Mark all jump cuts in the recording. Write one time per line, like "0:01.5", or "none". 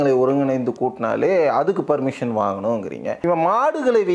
0:03.2